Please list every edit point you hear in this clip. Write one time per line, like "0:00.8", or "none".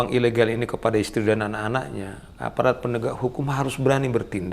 none